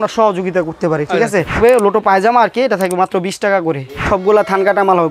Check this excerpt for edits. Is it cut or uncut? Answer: cut